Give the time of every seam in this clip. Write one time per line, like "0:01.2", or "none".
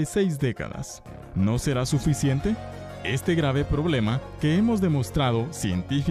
0:01.9